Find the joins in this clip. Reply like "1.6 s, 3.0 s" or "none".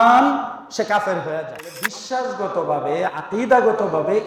1.8 s